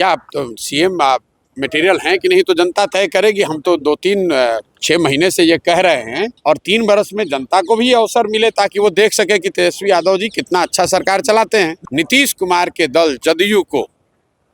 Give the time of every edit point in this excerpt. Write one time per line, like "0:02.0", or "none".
0:06.3
0:11.8